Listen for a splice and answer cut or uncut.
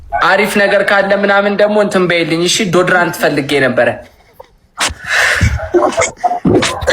uncut